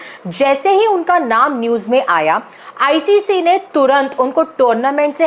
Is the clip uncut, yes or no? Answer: yes